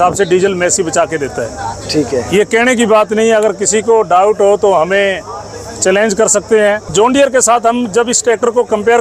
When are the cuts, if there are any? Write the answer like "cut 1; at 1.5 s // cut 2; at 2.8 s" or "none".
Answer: cut 1; at 6.9 s